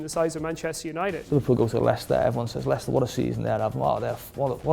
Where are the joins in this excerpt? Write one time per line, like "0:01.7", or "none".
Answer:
0:01.2